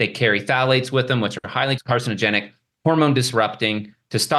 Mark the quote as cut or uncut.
cut